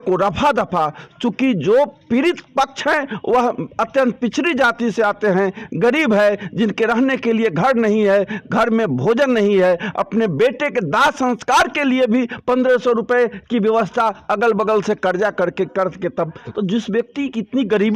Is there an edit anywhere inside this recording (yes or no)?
no